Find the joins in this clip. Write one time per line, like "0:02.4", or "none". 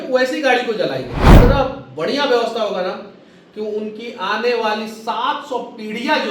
0:01.3